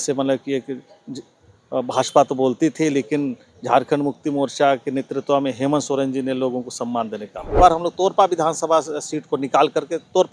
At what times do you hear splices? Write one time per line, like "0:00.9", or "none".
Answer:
0:07.5